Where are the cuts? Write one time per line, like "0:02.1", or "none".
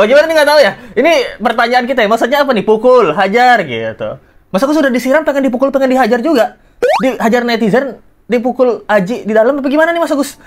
none

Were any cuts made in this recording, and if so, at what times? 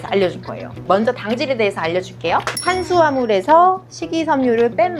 0:02.6

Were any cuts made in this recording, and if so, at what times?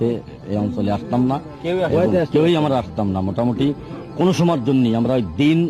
none

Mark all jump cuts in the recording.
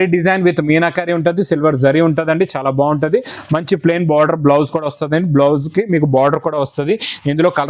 none

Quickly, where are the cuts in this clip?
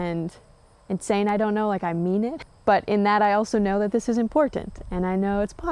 0:02.5

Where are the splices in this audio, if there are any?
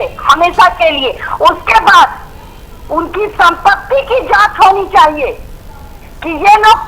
none

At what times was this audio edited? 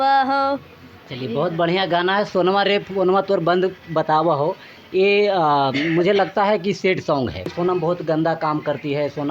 0:07.5

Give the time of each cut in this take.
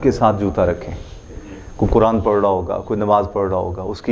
none

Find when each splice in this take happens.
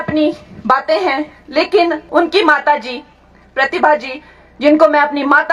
0:02.0

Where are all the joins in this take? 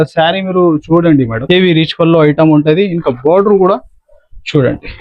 0:01.4

